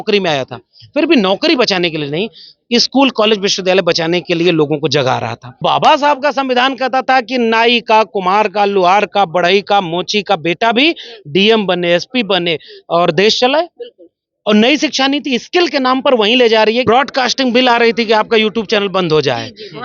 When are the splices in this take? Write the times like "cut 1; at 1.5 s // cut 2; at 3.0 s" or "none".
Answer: cut 1; at 5.6 s // cut 2; at 16.8 s